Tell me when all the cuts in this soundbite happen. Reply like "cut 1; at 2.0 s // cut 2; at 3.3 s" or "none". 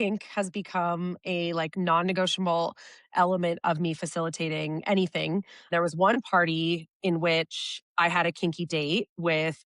cut 1; at 5.7 s